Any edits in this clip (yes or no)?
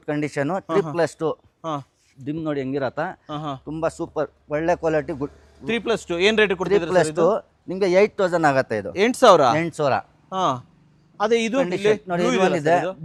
no